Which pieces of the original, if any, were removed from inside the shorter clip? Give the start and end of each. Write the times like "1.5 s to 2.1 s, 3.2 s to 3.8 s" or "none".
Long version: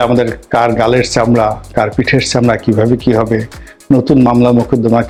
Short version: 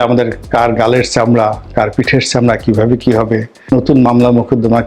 3.7 s to 3.9 s